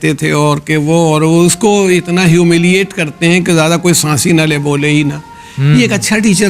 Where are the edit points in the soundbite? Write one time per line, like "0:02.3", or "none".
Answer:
none